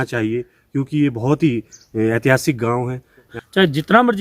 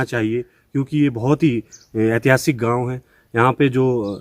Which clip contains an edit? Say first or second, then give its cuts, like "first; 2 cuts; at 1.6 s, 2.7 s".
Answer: first; 1 cut; at 3.3 s